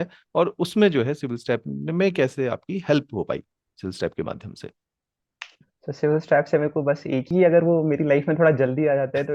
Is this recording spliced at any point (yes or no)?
yes